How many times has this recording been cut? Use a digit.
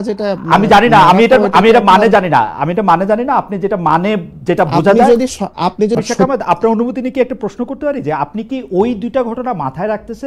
1